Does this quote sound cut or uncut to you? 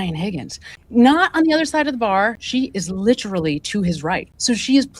cut